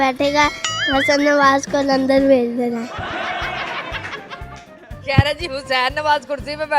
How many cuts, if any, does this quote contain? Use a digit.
0